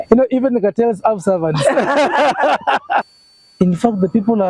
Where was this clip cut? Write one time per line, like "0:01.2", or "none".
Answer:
0:03.1